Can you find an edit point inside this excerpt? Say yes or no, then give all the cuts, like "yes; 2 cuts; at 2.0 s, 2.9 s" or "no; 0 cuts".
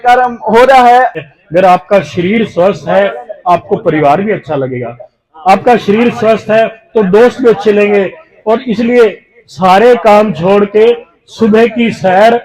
yes; 1 cut; at 1.1 s